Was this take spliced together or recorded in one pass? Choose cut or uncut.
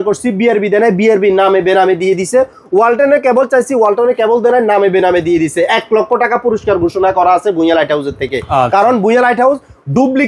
uncut